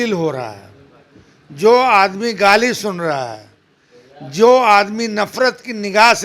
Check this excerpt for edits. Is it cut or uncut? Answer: uncut